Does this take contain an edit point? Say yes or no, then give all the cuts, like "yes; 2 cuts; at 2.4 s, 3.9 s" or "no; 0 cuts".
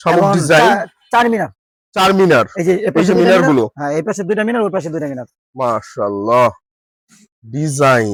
no; 0 cuts